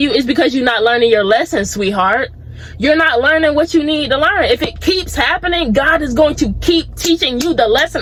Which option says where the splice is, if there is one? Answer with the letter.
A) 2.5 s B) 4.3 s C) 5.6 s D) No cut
D